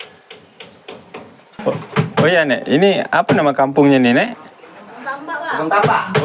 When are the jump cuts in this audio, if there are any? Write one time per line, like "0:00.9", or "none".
0:01.4